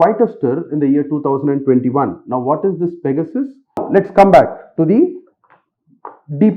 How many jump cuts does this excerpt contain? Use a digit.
1